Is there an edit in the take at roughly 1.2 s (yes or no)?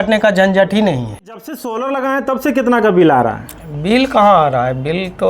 yes